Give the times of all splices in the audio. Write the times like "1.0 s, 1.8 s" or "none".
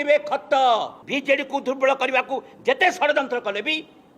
1.0 s